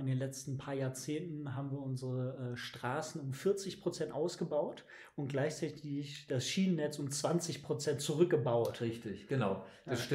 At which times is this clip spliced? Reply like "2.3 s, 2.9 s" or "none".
none